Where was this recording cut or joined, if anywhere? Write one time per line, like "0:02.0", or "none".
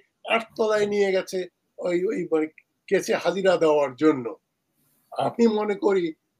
none